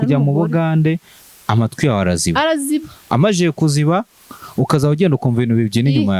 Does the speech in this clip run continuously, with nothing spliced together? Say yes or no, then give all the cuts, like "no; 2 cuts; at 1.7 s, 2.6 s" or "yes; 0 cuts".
yes; 0 cuts